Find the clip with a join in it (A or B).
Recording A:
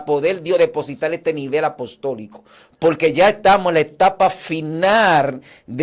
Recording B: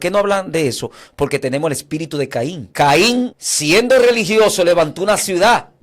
B